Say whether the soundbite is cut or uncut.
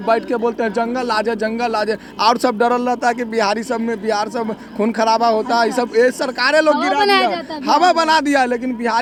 uncut